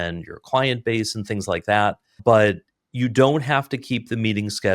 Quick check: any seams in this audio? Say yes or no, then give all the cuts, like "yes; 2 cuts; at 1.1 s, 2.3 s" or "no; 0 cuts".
yes; 1 cut; at 2.2 s